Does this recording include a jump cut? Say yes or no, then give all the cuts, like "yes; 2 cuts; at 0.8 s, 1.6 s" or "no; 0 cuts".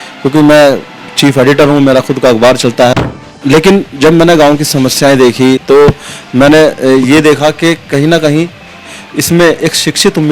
yes; 2 cuts; at 2.9 s, 5.6 s